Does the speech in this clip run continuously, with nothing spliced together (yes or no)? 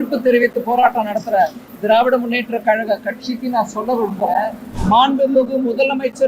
no